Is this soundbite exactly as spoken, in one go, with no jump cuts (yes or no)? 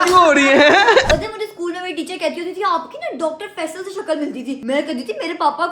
no